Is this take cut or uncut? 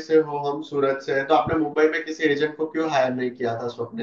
uncut